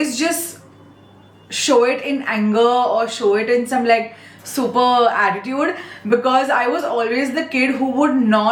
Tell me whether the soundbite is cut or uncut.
uncut